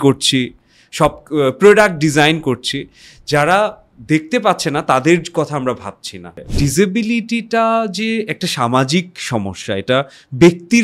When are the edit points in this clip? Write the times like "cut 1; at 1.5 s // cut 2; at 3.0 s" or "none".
cut 1; at 6.5 s